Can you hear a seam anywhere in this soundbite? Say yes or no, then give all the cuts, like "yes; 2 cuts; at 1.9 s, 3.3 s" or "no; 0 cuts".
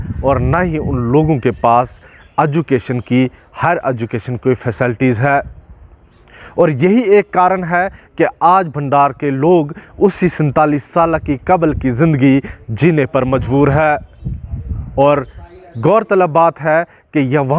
no; 0 cuts